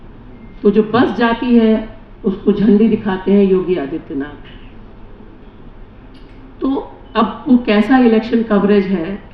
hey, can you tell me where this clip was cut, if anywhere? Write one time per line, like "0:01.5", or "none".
none

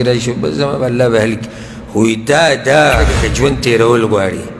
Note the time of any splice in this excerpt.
0:03.2

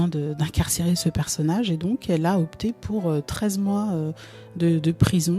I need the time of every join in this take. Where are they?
none

